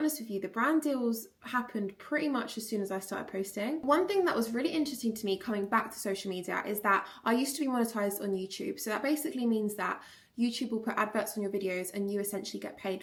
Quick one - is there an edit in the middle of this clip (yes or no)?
no